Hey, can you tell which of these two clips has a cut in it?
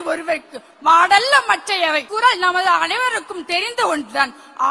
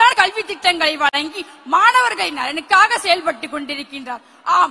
first; 1 cut; at 2.1 s

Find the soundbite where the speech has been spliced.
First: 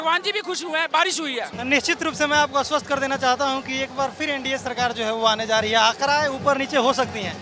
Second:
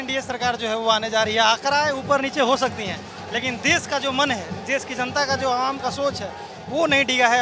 first; 1 cut; at 1.5 s

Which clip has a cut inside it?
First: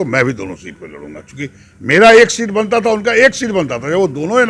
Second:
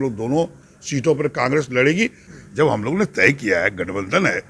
second; 1 cut; at 2.2 s

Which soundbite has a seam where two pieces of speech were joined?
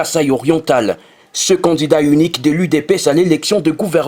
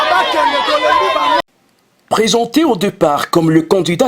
second; 1 cut; at 1.4 s

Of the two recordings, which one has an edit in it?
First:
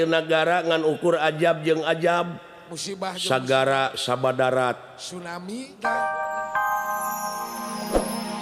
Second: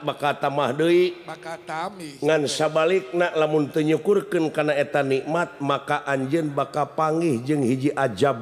first; 1 cut; at 6.0 s

